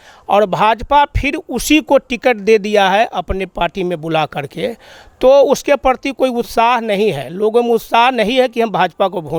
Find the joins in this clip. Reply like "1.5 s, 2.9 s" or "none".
none